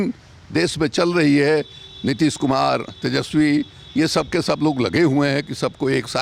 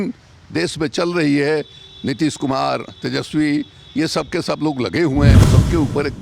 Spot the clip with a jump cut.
second; 1 cut; at 5.3 s

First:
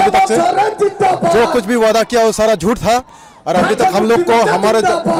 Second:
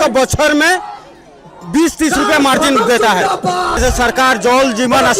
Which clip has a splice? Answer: second; 1 cut; at 3.8 s

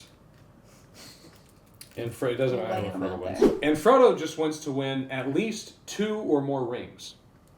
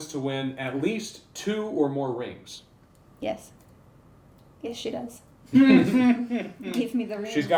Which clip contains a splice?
first; 1 cut; at 3.5 s

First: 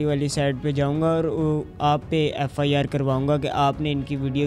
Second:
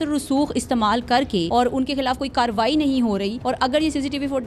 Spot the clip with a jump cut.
second; 2 cuts; at 1.5 s, 3.4 s

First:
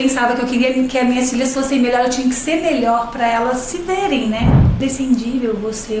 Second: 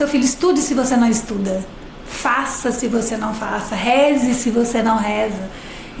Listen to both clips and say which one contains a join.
first; 1 cut; at 4.8 s

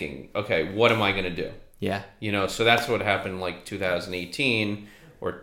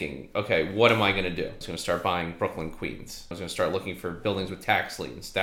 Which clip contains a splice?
second; 2 cuts; at 1.7 s, 3.3 s

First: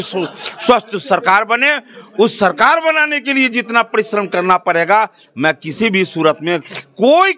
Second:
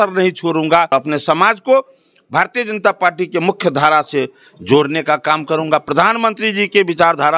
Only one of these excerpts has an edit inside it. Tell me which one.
second; 1 cut; at 0.9 s

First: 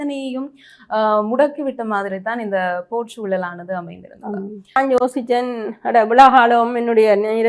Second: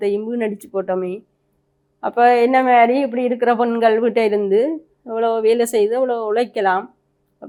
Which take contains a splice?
first; 1 cut; at 4.8 s

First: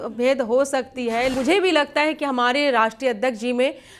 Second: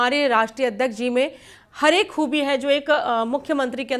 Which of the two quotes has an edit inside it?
first; 1 cut; at 1.3 s

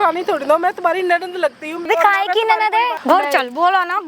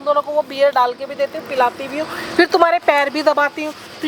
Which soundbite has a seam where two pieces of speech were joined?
first; 2 cuts; at 1.9 s, 3.0 s

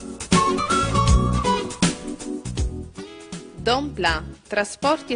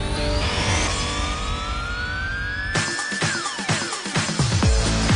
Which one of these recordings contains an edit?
first; 1 cut; at 3.5 s

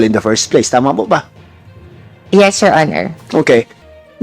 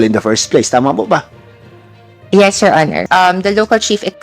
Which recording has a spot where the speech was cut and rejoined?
second; 1 cut; at 3.0 s

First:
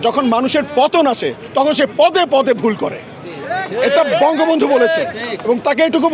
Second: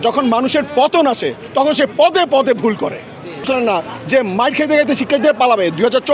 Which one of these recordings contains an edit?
second; 1 cut; at 3.4 s

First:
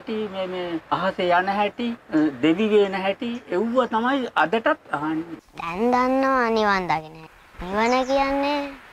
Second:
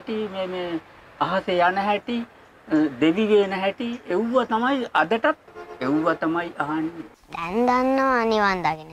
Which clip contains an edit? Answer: first; 4 cuts; at 0.8 s, 2.0 s, 5.2 s, 7.3 s

